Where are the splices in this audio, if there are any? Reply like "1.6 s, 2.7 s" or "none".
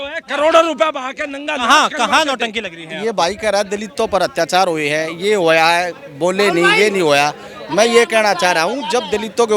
none